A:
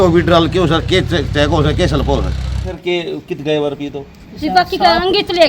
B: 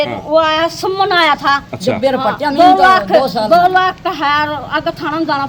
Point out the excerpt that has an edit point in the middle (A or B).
A